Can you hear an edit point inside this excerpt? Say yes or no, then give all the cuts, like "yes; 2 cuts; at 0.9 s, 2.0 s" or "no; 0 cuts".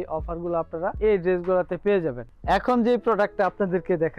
no; 0 cuts